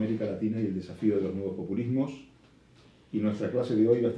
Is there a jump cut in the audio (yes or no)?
yes